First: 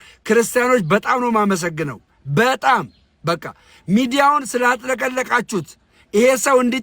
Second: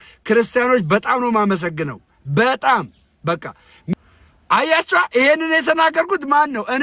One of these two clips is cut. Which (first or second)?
second